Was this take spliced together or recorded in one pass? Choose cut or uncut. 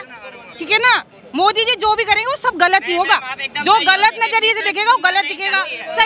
uncut